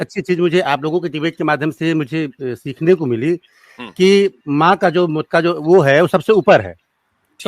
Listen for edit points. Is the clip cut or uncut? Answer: cut